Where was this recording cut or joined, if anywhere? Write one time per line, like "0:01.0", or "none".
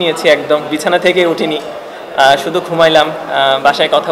none